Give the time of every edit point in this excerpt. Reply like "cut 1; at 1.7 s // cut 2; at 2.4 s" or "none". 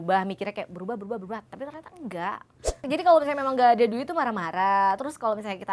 cut 1; at 2.8 s